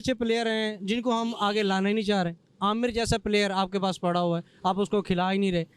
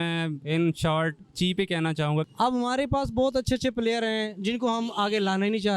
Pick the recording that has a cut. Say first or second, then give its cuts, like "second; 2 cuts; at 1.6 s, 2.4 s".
second; 1 cut; at 2.3 s